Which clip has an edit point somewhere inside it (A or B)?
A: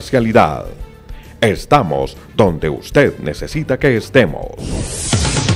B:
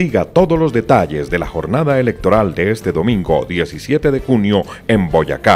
A